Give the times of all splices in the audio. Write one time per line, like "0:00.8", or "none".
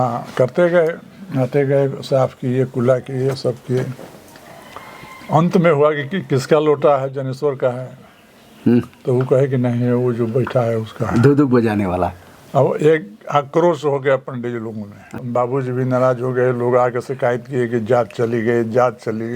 0:15.2